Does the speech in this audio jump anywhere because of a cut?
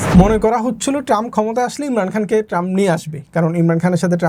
no; 0 cuts

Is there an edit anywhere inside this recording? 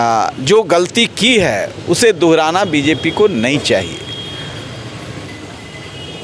no; 0 cuts

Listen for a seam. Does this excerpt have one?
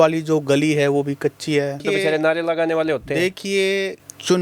yes; 1 cut; at 1.9 s

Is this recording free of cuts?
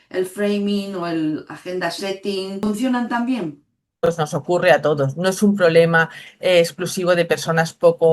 no; 2 cuts; at 2.6 s, 4.1 s

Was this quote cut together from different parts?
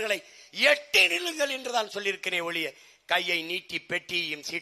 no; 0 cuts

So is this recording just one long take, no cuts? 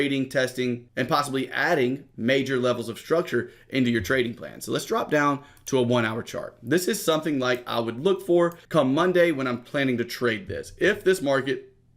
no; 1 cut; at 8.6 s

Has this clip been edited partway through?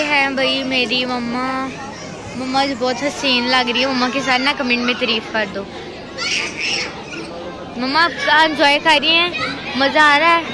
no; 0 cuts

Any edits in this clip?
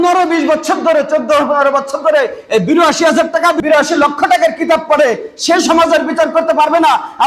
yes; 1 cut; at 3.6 s

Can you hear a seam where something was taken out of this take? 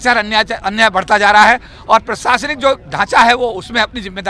no; 0 cuts

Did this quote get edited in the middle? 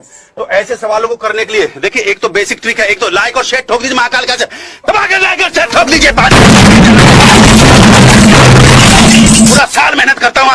no; 0 cuts

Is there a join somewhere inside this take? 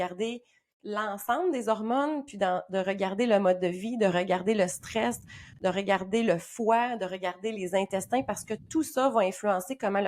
no; 0 cuts

